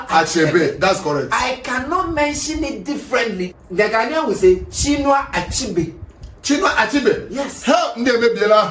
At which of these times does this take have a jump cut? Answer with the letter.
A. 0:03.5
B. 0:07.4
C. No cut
A